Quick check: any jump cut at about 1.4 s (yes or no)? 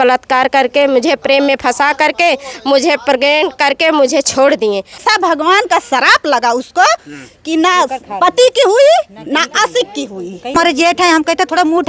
no